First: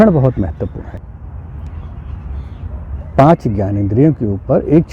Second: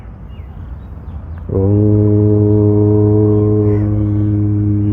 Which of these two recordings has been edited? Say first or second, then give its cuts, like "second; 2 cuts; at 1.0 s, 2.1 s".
first; 1 cut; at 1.0 s